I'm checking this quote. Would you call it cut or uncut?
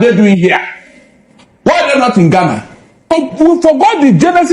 cut